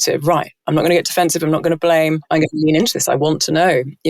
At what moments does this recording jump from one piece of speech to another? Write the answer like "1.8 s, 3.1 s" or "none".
2.2 s